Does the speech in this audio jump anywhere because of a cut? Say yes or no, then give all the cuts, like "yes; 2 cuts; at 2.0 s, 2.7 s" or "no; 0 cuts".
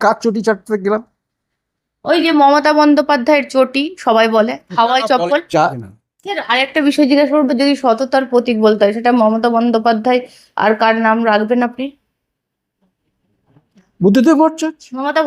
yes; 1 cut; at 5.6 s